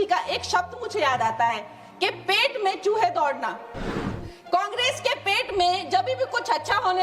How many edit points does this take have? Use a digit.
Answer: 0